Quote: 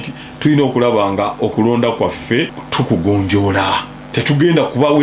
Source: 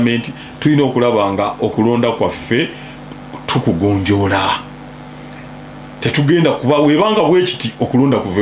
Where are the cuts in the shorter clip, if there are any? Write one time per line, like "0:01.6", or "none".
0:02.6
0:04.0